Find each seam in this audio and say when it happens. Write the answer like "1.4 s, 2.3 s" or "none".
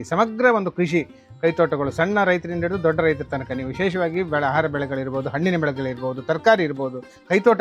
none